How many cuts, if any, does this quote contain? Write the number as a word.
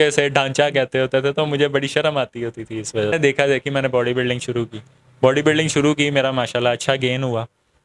one